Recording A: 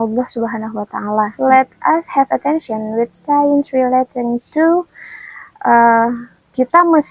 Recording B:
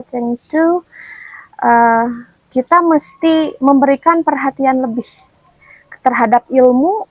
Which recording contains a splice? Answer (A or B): A